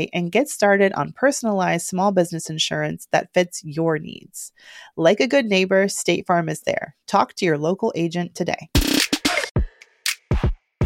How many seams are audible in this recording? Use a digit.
1